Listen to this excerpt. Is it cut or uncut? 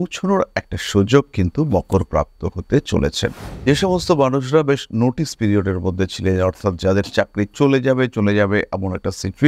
cut